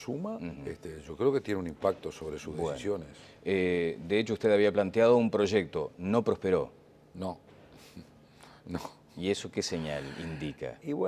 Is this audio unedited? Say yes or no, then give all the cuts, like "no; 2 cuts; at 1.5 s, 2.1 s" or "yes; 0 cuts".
no; 1 cut; at 8.6 s